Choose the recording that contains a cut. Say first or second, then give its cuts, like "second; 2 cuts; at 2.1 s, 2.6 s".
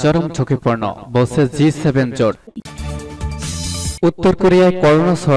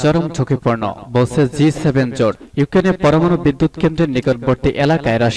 first; 2 cuts; at 2.4 s, 3.9 s